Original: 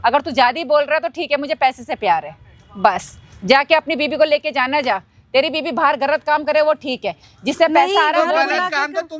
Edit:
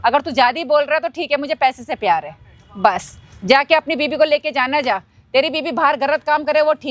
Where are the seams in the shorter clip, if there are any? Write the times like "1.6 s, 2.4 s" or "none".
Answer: none

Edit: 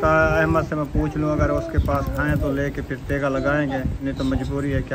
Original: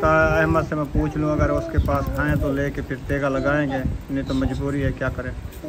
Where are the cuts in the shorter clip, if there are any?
3.9 s

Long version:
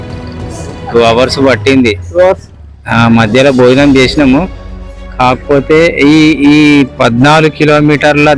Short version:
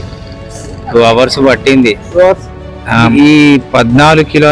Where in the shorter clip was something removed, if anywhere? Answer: 3.1 s

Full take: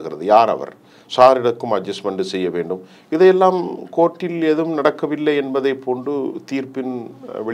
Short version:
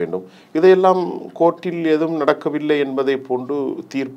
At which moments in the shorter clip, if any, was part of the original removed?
none

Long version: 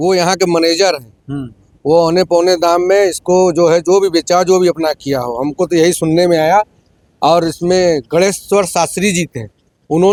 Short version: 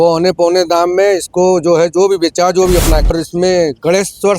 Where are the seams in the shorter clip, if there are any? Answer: 3.1 s

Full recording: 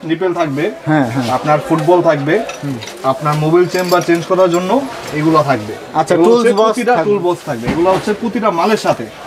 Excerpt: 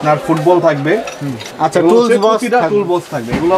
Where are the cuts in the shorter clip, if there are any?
1.4 s

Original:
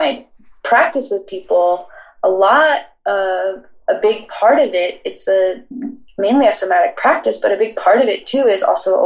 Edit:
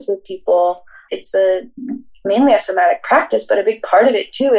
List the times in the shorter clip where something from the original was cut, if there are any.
1.0 s

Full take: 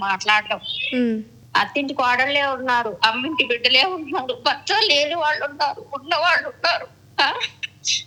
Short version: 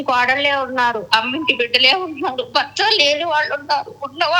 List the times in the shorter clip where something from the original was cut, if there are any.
none

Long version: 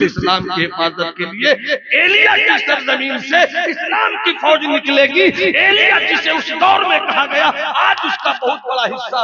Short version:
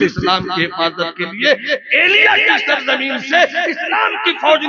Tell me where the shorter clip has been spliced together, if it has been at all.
none

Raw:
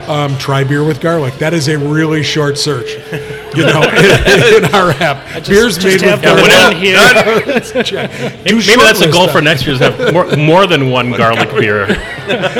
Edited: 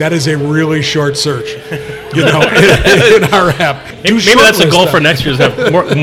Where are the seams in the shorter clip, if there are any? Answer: 3.9 s

